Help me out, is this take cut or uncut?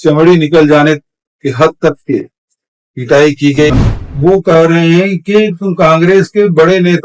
cut